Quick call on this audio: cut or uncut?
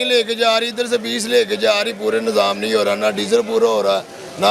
uncut